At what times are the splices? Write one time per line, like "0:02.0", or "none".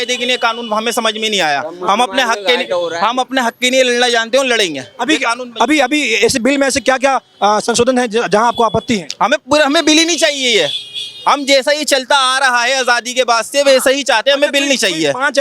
none

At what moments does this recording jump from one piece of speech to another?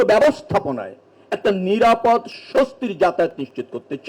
none

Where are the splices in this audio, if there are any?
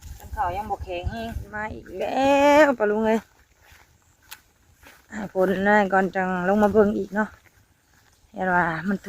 0:01.8

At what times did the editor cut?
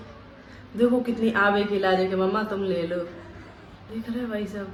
none

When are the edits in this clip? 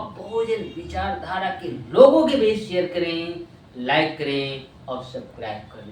none

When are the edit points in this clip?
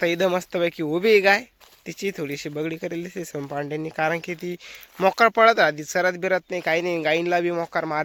none

